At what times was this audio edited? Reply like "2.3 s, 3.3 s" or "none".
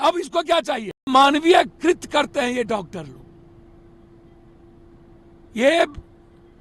1.1 s